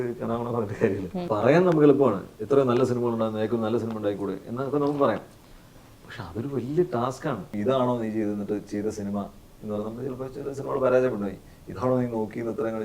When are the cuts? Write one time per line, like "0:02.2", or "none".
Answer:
0:01.3
0:07.5

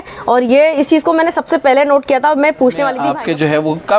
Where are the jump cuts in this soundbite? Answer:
0:03.0

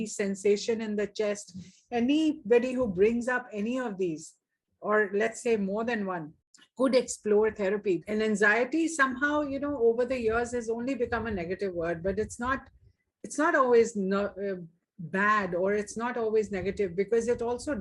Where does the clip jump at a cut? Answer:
0:08.0

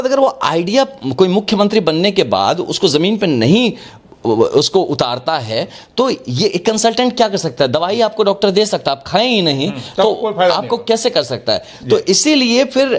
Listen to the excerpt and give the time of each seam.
none

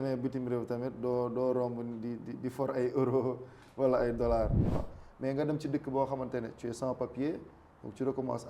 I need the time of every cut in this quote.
0:04.9

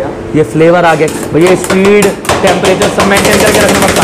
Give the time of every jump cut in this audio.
0:01.2

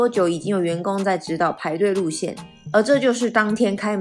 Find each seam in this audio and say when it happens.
none

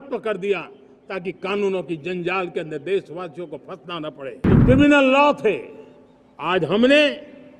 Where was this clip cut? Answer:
0:04.5

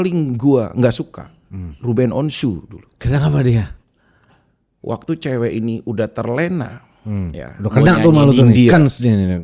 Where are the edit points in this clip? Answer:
none

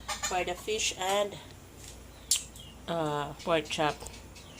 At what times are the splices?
0:03.3

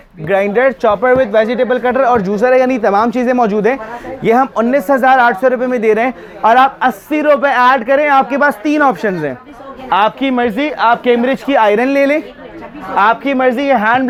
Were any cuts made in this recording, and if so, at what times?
none

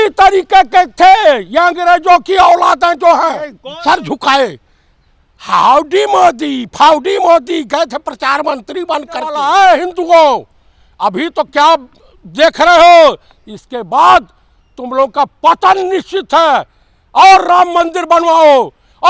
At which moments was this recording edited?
0:03.7
0:09.4

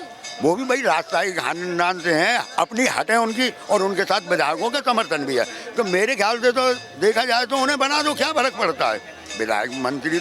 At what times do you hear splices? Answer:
none

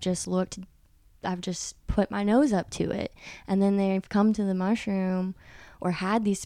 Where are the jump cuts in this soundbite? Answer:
none

